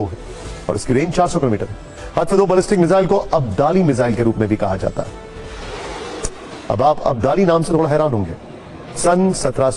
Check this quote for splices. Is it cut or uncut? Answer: uncut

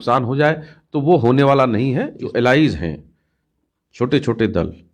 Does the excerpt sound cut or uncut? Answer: cut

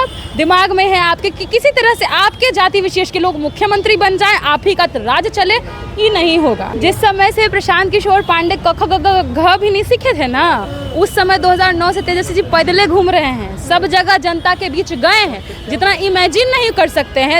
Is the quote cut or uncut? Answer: cut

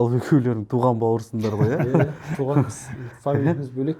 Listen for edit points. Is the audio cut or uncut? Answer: uncut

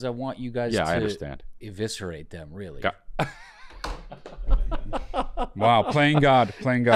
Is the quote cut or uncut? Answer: uncut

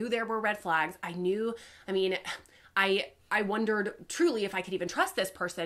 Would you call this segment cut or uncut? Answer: uncut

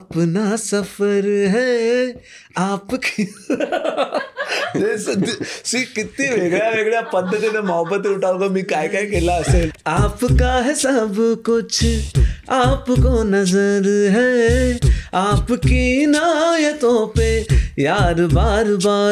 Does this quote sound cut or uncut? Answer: cut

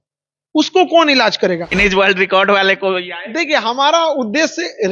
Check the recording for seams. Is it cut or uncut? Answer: cut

